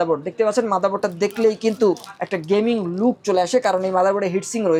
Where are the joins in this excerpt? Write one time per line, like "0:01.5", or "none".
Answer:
none